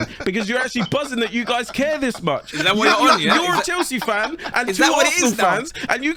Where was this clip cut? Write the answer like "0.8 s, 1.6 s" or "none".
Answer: none